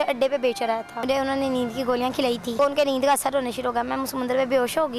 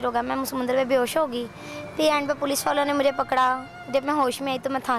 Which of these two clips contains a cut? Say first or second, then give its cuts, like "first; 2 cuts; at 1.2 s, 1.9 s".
first; 2 cuts; at 1.0 s, 2.6 s